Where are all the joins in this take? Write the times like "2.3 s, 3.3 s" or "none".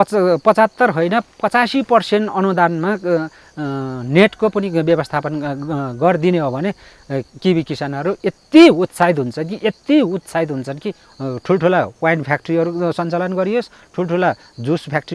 11.1 s